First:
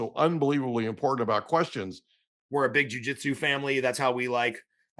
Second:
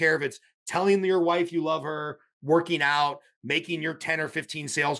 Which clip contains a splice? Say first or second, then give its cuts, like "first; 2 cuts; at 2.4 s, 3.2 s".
first; 1 cut; at 2.3 s